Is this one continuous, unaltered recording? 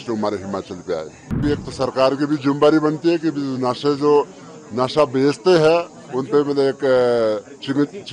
no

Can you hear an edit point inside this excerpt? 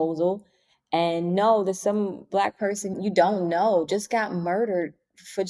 yes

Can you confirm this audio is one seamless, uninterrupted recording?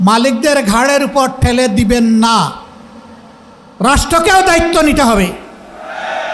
yes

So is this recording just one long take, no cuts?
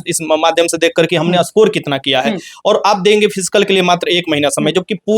yes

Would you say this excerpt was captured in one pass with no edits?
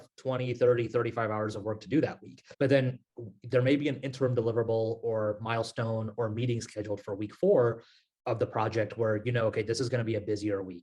no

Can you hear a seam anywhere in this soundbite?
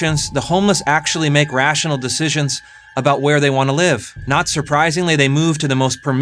yes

